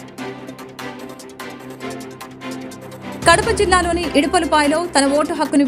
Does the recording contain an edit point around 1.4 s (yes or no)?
yes